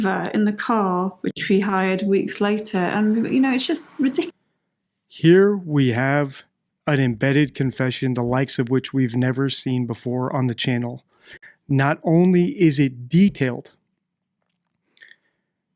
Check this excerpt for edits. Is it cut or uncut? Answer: uncut